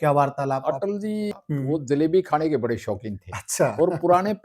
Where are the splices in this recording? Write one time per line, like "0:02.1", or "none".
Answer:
0:01.3

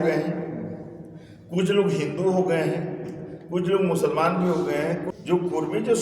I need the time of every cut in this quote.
0:05.1

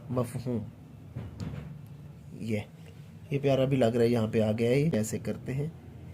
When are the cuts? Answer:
0:05.0

